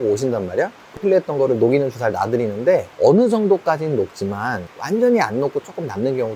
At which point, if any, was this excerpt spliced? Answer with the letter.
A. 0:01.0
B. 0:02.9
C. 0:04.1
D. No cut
A